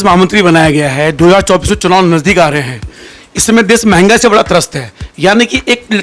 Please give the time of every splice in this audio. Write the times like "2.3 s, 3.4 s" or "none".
none